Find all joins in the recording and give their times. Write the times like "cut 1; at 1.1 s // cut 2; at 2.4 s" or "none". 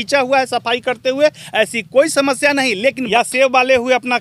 cut 1; at 3.0 s